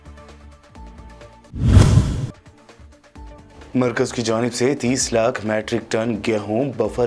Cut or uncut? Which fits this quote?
cut